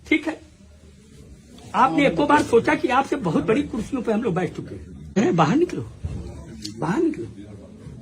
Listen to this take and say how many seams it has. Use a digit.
1